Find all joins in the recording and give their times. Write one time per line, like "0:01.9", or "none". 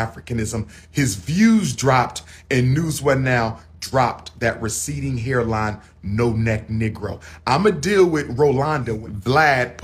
0:08.9